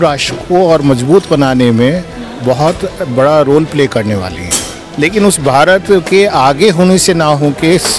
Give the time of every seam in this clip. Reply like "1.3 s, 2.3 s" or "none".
4.8 s